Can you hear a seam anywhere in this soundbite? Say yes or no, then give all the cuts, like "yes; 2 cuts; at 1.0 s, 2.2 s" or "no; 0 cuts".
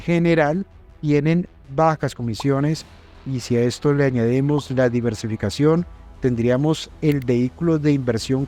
no; 0 cuts